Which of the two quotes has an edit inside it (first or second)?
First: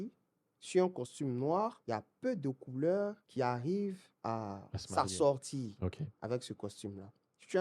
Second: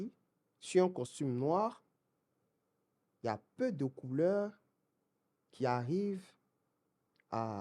first